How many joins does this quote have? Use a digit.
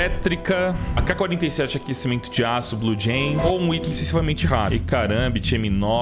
1